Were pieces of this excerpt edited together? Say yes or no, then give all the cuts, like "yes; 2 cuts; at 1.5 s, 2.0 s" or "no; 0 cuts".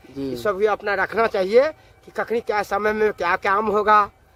no; 0 cuts